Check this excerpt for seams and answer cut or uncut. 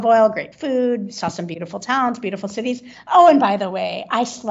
uncut